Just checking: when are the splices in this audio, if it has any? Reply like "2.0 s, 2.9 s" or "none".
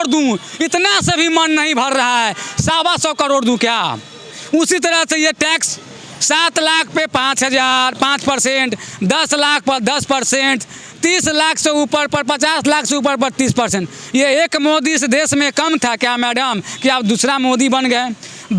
none